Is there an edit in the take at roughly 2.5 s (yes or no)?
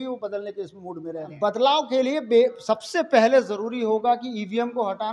no